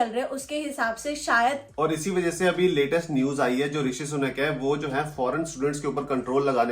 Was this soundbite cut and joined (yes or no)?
yes